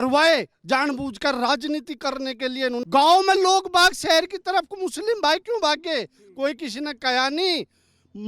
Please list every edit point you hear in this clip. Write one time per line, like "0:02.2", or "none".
0:02.8